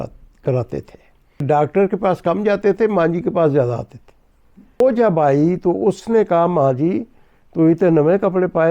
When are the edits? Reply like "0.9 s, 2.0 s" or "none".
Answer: 1.4 s, 4.8 s